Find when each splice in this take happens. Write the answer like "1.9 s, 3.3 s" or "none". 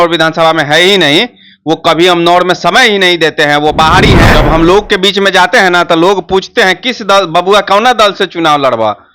4.3 s